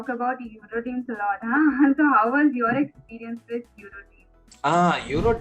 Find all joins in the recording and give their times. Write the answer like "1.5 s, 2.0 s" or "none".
4.5 s

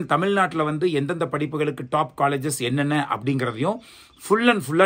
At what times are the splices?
none

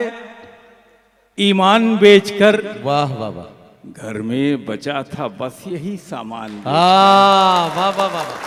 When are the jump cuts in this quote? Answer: none

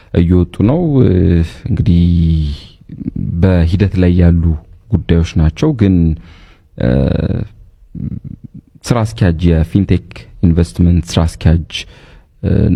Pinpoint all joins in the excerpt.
none

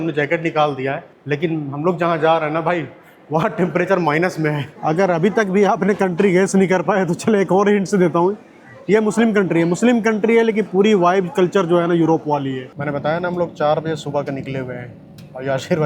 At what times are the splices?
1.1 s, 4.7 s, 12.7 s

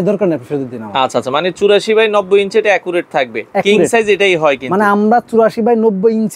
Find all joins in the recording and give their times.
none

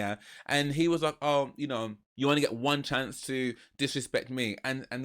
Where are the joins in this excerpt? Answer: 2.0 s

